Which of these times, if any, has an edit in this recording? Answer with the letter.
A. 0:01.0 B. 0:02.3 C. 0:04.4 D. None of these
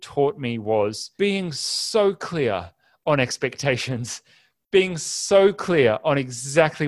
A